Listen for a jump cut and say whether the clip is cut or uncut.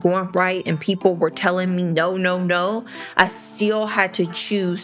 uncut